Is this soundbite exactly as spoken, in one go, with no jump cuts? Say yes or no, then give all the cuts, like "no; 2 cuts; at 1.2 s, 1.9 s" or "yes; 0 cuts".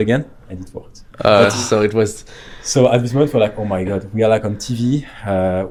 yes; 0 cuts